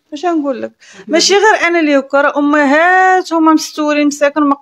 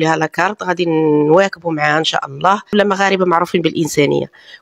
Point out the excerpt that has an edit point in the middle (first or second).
second